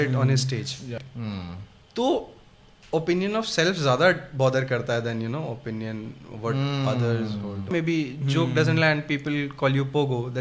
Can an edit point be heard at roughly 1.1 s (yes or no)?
yes